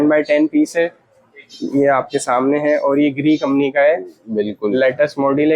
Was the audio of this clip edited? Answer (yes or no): no